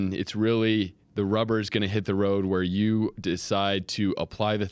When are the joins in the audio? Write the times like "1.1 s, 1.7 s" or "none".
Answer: none